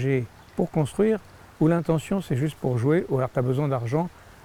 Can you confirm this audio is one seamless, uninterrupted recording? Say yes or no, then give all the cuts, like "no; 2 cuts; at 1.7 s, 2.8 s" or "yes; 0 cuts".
yes; 0 cuts